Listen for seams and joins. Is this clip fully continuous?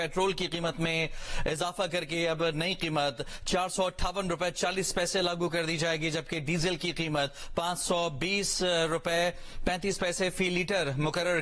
yes; 0 cuts

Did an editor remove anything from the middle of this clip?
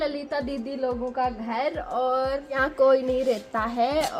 no; 0 cuts

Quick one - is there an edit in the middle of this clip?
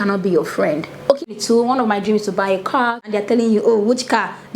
yes; 2 cuts; at 1.4 s, 3.0 s

